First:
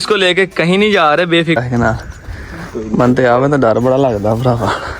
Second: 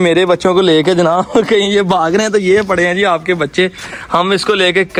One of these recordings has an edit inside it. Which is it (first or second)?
first